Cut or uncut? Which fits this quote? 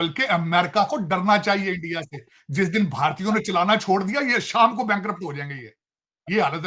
uncut